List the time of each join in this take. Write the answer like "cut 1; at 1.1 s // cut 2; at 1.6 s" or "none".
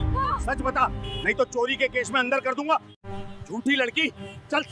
cut 1; at 3.0 s